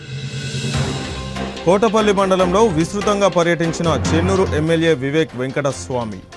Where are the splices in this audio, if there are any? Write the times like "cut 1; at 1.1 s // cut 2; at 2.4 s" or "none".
cut 1; at 1.6 s